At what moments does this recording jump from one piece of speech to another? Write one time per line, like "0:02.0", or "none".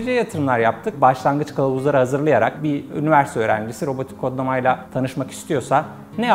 0:00.9
0:02.5

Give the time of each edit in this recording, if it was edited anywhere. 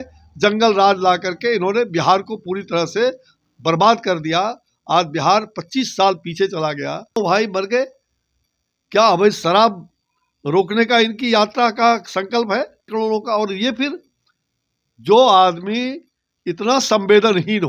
0:07.2
0:12.9

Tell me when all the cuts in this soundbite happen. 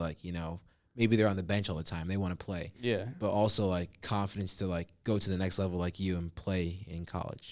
none

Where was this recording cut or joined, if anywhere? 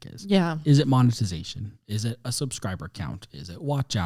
none

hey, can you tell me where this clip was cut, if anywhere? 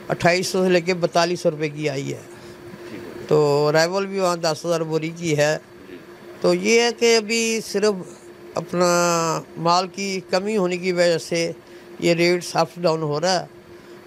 none

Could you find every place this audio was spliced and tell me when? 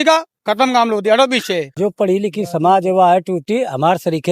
0:01.7

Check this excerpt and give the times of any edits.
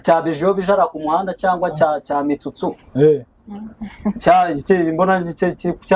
none

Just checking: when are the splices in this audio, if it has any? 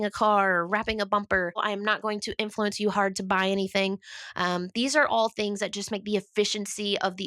0:01.6

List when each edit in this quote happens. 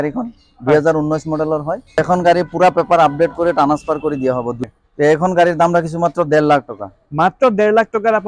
0:02.0
0:04.6

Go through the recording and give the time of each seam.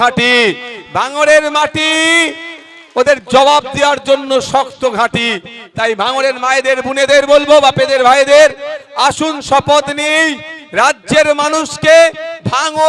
none

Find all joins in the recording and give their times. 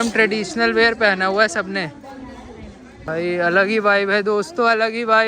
0:02.9

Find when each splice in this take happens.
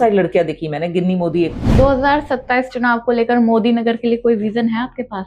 0:01.6

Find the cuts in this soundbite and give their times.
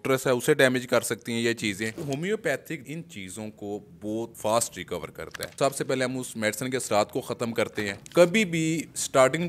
0:02.0
0:02.8
0:04.3
0:05.5
0:07.9

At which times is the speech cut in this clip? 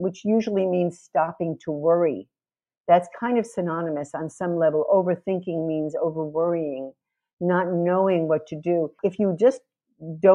0:08.9

